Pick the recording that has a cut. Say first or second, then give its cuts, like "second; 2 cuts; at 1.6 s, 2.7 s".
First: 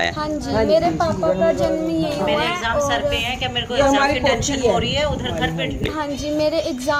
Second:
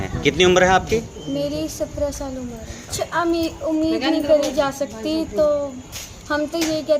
second; 1 cut; at 3.0 s